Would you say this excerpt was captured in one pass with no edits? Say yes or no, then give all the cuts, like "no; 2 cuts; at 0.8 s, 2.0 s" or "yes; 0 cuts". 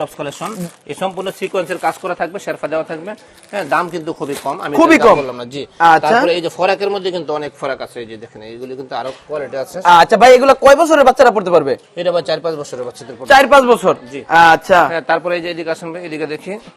yes; 0 cuts